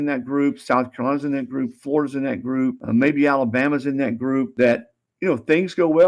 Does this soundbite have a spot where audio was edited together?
yes; 2 cuts; at 2.8 s, 4.5 s

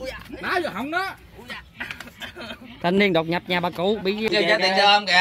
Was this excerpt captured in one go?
no; 1 cut; at 4.3 s

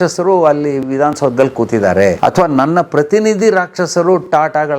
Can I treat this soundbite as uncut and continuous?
no; 1 cut; at 2.2 s

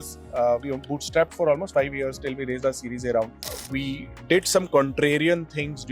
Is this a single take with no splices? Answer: no; 1 cut; at 3.6 s

